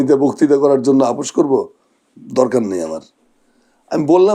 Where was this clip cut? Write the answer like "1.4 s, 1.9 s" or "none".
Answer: none